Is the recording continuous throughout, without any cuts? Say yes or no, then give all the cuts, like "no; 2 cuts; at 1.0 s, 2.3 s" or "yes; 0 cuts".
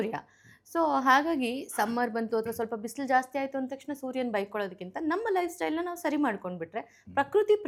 yes; 0 cuts